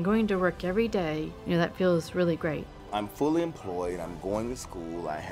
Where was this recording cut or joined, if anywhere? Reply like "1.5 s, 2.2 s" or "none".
1.4 s, 2.8 s